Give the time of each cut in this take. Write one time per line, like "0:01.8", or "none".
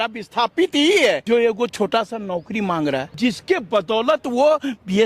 0:01.2
0:03.1